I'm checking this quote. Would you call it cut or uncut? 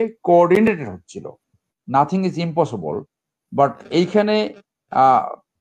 cut